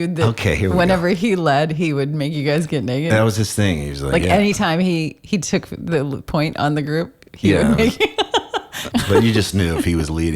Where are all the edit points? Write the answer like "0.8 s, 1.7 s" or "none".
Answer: 8.8 s